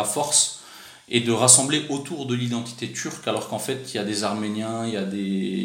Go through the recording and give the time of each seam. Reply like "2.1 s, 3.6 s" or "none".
none